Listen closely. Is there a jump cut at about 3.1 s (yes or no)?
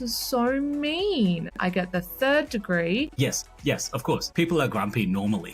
yes